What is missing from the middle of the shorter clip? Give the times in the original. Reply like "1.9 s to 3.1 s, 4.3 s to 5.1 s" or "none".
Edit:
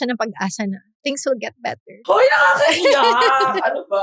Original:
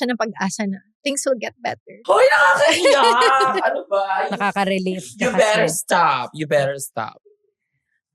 none